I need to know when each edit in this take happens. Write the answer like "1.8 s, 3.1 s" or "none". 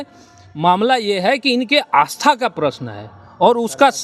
none